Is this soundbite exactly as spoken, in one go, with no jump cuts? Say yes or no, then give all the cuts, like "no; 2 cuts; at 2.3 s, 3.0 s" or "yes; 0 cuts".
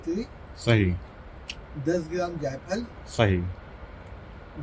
yes; 0 cuts